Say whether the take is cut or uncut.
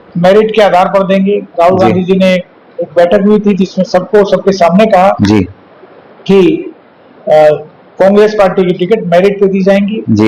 uncut